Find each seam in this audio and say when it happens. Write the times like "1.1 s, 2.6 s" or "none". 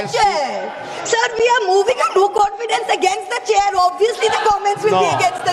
none